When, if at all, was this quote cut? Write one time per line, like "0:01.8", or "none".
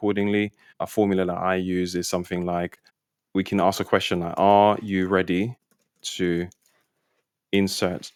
none